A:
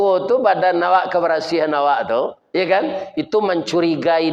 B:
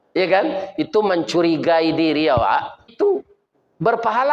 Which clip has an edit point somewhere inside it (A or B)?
B